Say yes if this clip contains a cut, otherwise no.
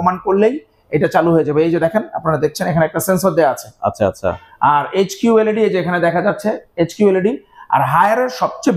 no